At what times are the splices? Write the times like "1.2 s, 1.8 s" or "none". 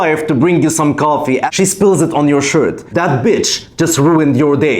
1.5 s, 2.8 s